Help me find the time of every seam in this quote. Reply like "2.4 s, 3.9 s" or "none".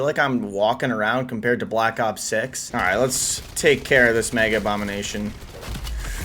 2.6 s